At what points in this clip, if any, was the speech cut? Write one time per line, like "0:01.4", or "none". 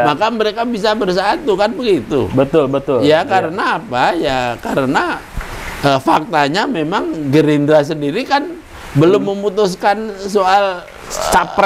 none